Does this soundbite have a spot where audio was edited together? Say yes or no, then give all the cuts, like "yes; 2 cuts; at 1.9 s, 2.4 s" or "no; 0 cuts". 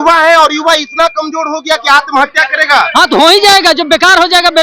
no; 0 cuts